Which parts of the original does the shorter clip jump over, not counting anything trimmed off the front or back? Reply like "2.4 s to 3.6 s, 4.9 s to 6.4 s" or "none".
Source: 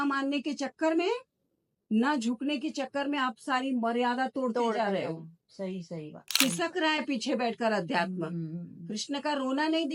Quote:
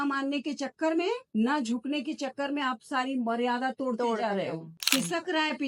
1.2 s to 1.8 s, 5.3 s to 6.2 s